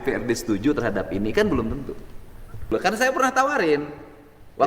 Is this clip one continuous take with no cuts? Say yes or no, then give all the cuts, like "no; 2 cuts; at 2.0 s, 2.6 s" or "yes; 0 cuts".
no; 1 cut; at 2.7 s